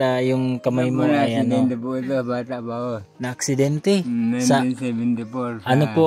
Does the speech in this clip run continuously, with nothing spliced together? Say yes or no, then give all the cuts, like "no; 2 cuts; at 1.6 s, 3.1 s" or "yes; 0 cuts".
yes; 0 cuts